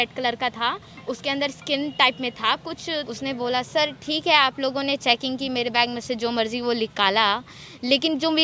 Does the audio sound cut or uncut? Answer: cut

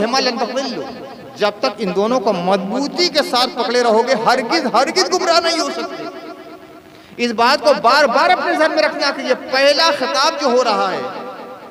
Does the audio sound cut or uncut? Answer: uncut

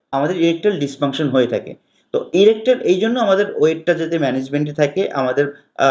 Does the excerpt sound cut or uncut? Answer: uncut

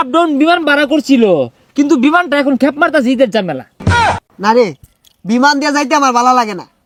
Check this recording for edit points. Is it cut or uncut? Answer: uncut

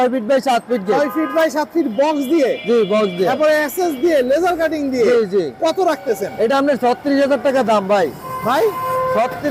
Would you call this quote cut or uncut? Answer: uncut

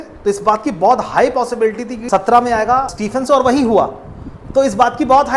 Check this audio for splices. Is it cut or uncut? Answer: cut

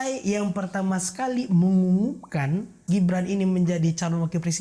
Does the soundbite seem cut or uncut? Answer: cut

